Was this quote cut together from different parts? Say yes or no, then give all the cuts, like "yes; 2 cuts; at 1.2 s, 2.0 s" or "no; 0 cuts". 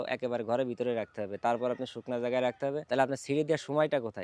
yes; 1 cut; at 2.8 s